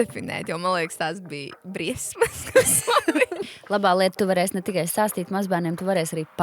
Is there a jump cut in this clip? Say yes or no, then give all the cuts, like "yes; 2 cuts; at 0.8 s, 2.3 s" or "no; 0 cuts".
yes; 1 cut; at 3.5 s